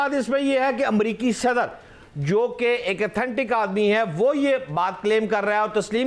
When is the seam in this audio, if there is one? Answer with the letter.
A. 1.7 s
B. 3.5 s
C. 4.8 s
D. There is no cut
D